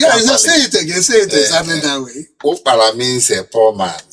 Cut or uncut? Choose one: uncut